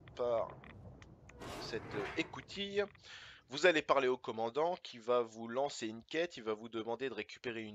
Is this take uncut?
no; 1 cut; at 4.1 s

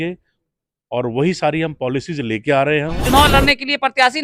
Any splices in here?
yes; 1 cut; at 3.0 s

